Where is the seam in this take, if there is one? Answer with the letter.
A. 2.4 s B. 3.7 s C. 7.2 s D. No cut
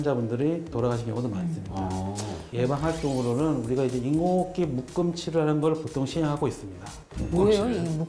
A